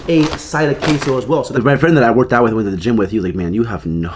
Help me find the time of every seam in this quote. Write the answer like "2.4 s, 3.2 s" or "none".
1.5 s

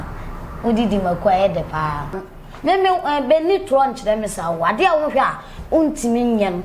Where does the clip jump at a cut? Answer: 2.1 s

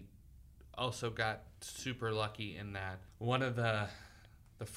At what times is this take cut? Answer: 3.0 s

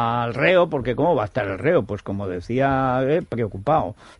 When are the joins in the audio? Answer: 2.5 s

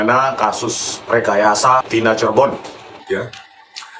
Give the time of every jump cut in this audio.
1.9 s, 3.0 s

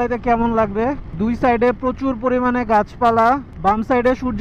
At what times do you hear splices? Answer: 1.1 s

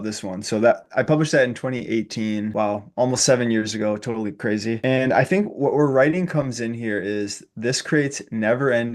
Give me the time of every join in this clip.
2.5 s, 4.8 s

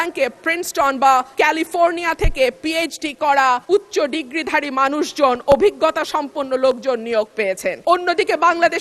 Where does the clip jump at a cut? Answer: 1.3 s, 3.6 s, 7.8 s

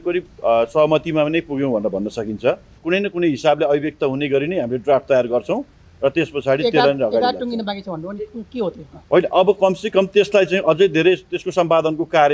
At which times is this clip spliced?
2.7 s

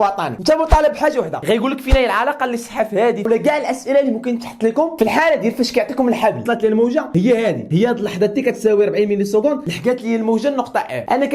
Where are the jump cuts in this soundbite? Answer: 3.3 s, 6.4 s

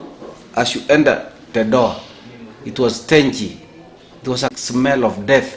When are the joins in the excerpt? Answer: 4.5 s

